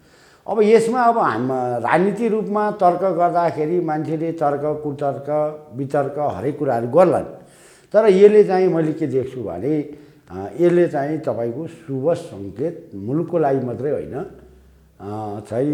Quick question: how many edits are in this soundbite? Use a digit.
0